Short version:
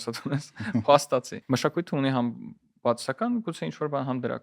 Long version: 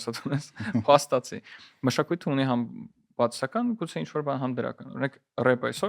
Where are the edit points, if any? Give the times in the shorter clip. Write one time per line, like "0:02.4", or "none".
0:01.4

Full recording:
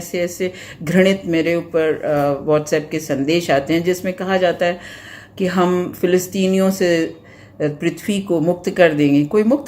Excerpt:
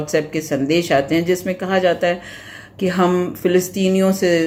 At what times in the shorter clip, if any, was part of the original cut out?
none

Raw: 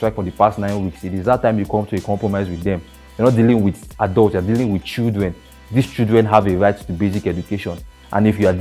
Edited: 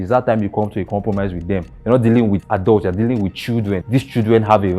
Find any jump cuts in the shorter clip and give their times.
0:01.7
0:02.4
0:03.8

